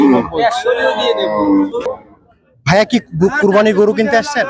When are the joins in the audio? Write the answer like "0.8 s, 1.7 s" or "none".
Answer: 1.5 s

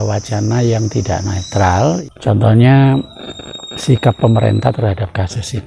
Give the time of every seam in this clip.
2.0 s

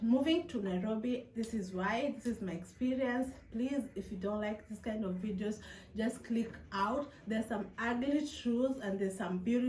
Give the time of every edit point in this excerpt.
none

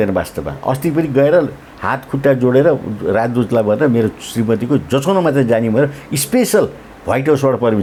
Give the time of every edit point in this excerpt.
none

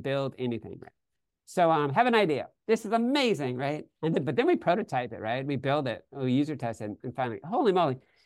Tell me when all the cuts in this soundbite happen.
none

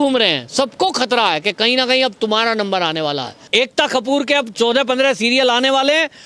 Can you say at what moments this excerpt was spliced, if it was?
3.4 s

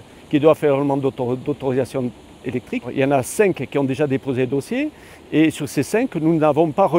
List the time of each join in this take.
none

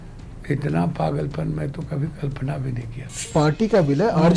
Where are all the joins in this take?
3.3 s

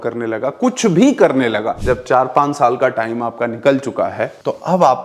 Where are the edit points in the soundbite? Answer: 1.7 s

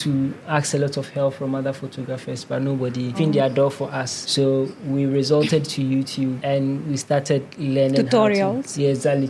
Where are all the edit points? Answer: none

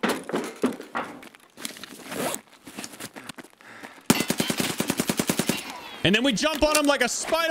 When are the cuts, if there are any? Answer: 1.1 s, 3.4 s

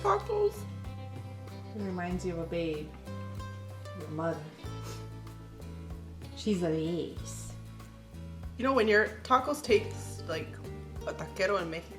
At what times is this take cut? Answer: none

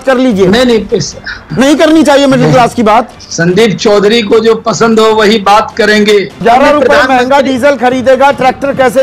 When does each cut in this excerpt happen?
3.1 s, 6.4 s

